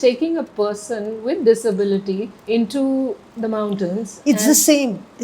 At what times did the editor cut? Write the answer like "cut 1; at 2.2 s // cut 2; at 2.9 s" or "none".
cut 1; at 2.3 s // cut 2; at 3.3 s